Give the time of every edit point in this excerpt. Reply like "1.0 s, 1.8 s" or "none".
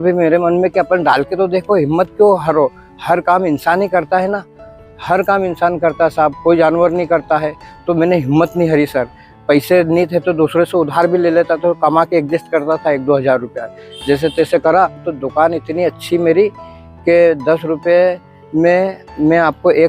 15.2 s, 16.6 s